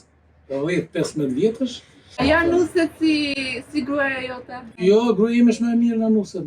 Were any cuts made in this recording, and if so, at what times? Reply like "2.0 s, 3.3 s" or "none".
2.2 s, 4.7 s